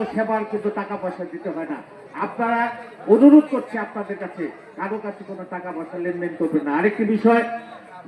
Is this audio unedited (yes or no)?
yes